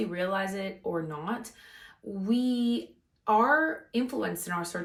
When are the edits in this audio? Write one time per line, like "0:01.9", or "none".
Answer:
none